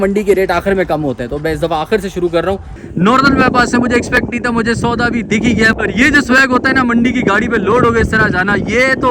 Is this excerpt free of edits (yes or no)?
no